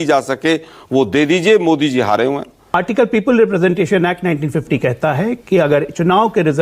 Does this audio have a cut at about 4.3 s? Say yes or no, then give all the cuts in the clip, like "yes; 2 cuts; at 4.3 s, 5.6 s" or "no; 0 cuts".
no; 1 cut; at 2.8 s